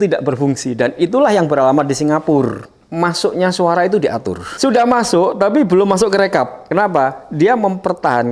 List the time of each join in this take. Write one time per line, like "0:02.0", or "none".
0:02.8
0:04.5
0:06.6